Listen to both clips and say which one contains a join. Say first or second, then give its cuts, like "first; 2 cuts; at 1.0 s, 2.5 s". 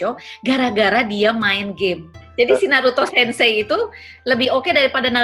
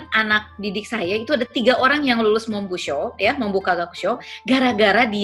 first; 1 cut; at 2.2 s